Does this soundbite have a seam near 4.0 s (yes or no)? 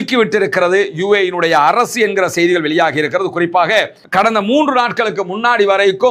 yes